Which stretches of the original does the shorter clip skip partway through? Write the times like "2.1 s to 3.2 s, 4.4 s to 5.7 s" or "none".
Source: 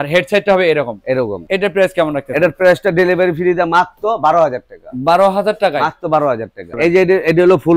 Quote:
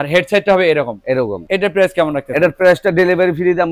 none